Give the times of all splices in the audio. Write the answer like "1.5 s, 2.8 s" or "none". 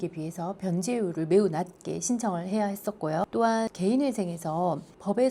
none